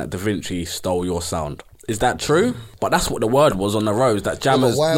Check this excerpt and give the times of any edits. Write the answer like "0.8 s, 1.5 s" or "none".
1.7 s, 2.7 s